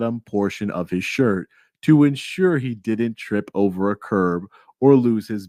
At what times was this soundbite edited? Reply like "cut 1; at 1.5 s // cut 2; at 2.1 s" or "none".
none